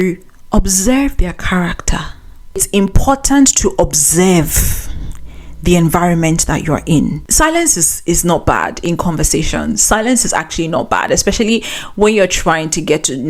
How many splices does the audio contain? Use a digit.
2